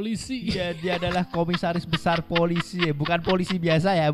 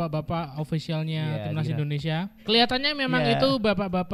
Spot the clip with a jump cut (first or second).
second